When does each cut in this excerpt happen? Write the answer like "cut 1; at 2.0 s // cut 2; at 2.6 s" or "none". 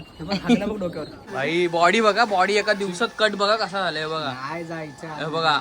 cut 1; at 1.2 s